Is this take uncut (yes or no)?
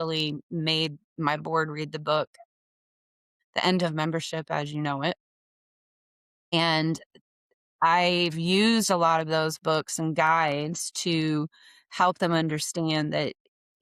yes